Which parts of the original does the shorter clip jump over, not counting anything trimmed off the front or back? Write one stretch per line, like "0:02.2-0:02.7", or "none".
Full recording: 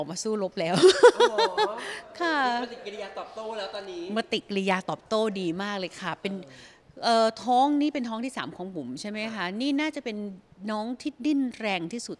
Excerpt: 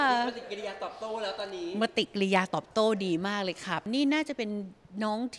0:06.2-0:09.5